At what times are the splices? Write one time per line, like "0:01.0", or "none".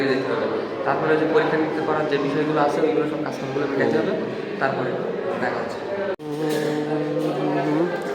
none